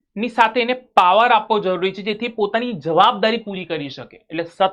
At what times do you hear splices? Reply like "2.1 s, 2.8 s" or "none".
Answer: none